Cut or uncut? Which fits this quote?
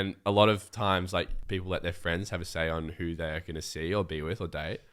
cut